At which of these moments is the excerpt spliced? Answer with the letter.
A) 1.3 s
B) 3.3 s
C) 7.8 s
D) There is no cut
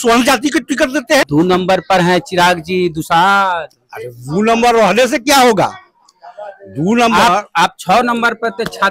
A